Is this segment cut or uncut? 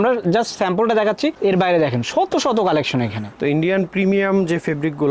cut